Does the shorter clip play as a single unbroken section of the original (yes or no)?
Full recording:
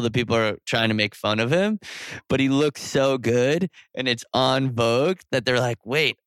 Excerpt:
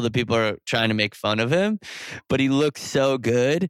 yes